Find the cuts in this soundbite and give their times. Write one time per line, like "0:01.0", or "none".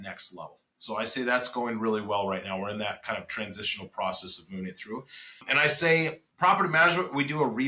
0:05.5
0:06.2